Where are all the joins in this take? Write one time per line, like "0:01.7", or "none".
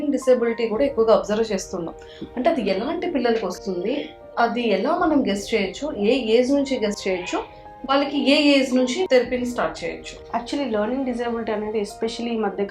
none